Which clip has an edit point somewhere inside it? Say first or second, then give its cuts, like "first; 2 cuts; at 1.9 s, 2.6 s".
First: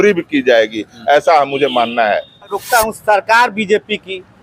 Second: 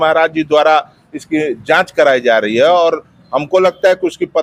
first; 1 cut; at 2.6 s